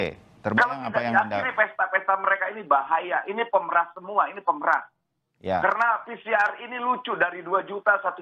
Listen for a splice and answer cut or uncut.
uncut